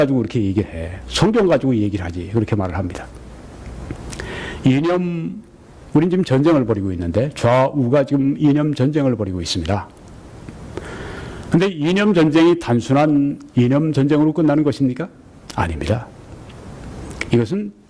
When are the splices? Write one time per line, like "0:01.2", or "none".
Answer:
none